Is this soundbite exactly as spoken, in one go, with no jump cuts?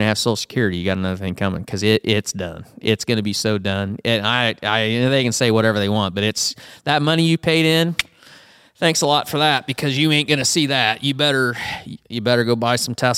yes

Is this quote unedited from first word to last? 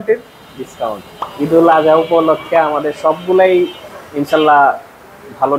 yes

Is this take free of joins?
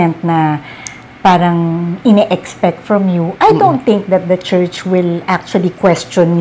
yes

